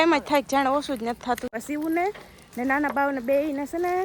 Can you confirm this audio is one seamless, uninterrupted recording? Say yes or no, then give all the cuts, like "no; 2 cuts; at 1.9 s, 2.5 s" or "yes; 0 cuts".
no; 1 cut; at 1.5 s